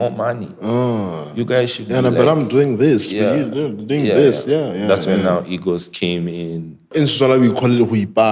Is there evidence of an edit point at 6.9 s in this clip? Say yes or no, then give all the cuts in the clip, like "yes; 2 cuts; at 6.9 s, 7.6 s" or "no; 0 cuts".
yes; 1 cut; at 6.9 s